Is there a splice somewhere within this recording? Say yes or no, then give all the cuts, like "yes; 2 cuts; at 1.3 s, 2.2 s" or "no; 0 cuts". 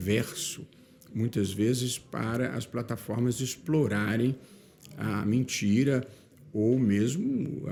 no; 0 cuts